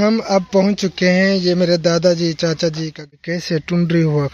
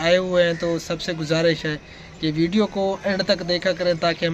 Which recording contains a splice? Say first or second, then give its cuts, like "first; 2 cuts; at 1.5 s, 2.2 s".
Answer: first; 1 cut; at 3.0 s